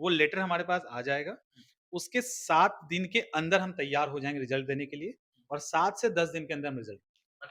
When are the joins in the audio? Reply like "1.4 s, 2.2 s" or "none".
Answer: none